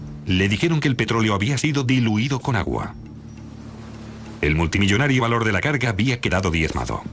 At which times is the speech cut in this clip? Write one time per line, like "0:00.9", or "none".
0:05.4